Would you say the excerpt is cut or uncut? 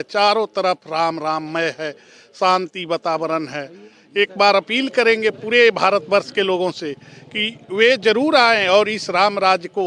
uncut